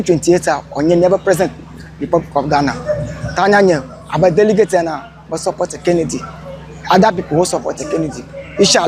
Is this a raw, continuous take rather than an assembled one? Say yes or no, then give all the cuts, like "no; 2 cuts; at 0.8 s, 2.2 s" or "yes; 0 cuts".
yes; 0 cuts